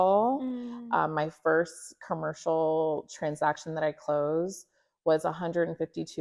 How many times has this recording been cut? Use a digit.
0